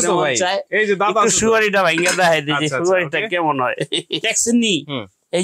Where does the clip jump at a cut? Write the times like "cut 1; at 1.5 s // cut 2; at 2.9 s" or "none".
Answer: cut 1; at 4.3 s